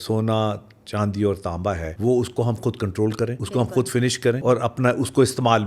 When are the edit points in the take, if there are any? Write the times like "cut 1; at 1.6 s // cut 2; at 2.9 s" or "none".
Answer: cut 1; at 1.9 s // cut 2; at 3.4 s // cut 3; at 4.4 s